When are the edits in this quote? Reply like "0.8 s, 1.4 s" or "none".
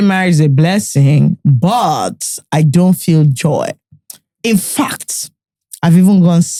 none

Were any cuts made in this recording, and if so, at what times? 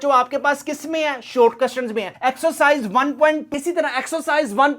3.5 s

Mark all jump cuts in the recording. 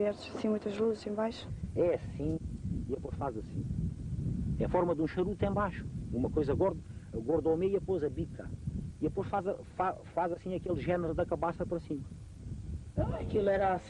none

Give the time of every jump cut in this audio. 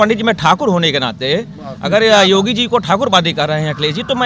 none

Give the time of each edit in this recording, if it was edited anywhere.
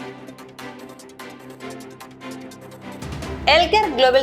1.2 s, 2.4 s

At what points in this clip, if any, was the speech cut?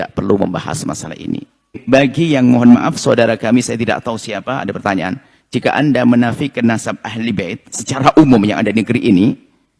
1.8 s

